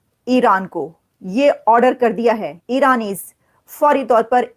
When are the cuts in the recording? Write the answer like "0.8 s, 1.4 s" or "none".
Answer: 2.5 s